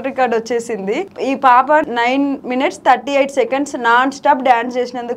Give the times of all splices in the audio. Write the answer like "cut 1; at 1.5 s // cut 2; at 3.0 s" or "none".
cut 1; at 1.1 s // cut 2; at 2.0 s